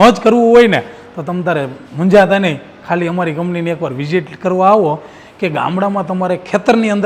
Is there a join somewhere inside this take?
no; 0 cuts

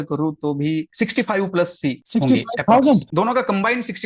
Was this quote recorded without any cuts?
yes; 0 cuts

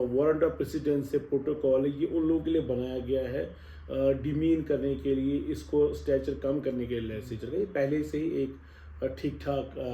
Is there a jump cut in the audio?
no; 0 cuts

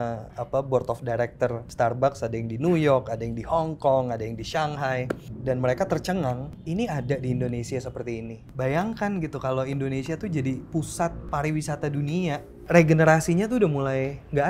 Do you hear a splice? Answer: yes; 6 cuts; at 1.6 s, 5.3 s, 6.5 s, 8.4 s, 11.2 s, 12.5 s

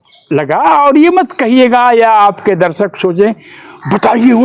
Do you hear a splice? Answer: no; 0 cuts

